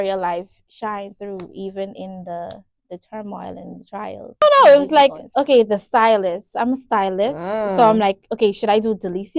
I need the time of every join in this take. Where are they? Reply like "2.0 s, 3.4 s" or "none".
4.4 s

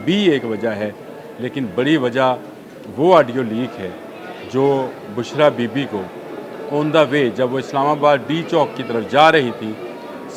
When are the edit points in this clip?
none

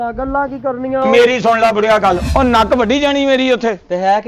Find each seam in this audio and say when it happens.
2.2 s

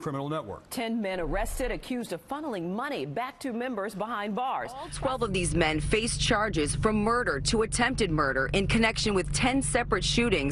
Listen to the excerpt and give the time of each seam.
4.9 s

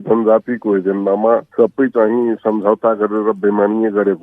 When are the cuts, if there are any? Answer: 1.5 s

